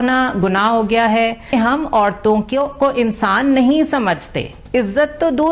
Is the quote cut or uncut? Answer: cut